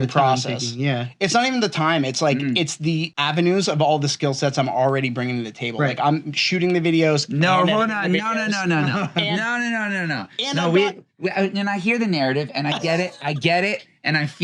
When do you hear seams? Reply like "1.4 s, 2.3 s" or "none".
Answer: 3.1 s